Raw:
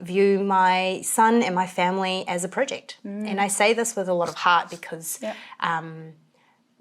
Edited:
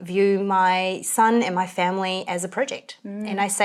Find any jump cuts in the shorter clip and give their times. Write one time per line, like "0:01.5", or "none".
none